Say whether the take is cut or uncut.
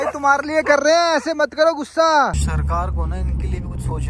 cut